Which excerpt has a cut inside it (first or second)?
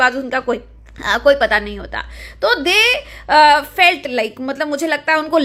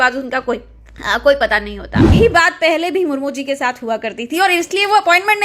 second